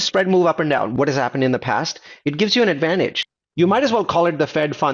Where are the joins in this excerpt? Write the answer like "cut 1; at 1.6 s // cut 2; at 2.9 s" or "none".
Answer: cut 1; at 0.9 s // cut 2; at 3.2 s

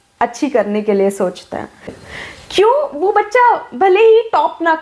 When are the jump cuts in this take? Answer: cut 1; at 1.8 s

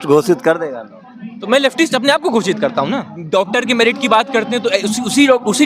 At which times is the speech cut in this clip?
cut 1; at 3.1 s

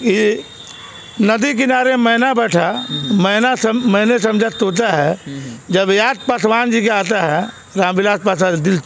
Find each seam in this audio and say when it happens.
none

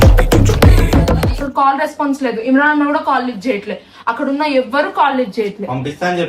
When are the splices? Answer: cut 1; at 1.4 s

